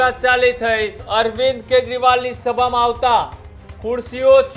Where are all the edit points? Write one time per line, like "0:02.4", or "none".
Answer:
0:01.0